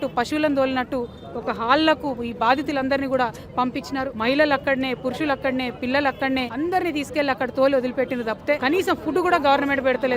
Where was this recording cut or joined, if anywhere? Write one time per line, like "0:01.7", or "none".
0:04.1
0:06.5
0:08.6